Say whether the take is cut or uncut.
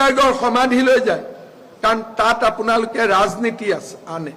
uncut